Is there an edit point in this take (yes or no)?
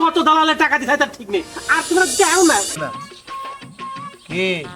yes